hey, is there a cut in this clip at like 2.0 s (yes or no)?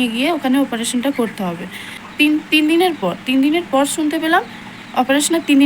yes